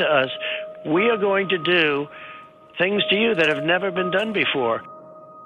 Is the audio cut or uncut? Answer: uncut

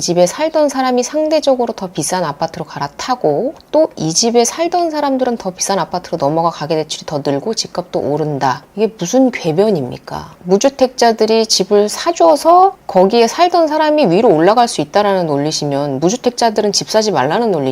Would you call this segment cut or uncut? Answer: cut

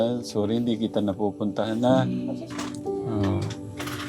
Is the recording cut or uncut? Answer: cut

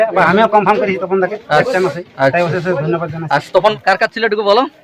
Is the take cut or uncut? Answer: cut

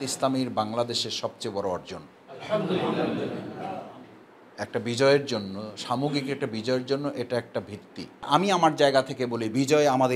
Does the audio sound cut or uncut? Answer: cut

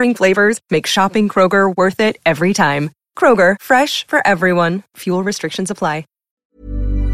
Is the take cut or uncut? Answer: cut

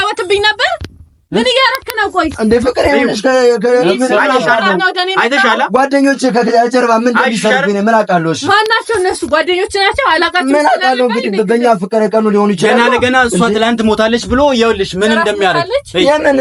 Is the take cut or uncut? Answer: uncut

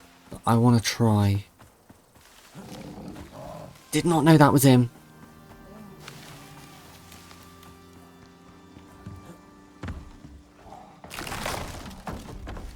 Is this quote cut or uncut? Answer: uncut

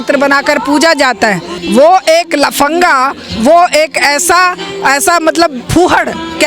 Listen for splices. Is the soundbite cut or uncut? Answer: cut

